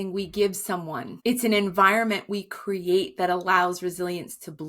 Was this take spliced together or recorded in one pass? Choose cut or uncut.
cut